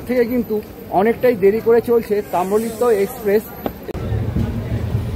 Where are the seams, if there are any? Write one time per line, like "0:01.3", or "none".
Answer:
0:03.9